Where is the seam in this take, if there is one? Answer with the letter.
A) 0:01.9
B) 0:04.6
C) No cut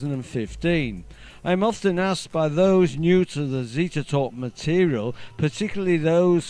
C